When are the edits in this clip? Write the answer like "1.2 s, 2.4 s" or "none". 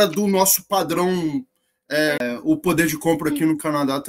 2.2 s